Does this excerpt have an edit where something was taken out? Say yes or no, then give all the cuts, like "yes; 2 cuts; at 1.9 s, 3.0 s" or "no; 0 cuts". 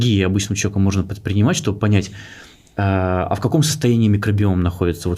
no; 0 cuts